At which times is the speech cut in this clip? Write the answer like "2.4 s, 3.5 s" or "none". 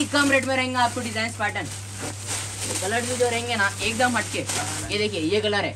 none